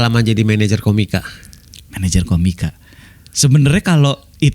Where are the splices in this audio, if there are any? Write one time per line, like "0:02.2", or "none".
none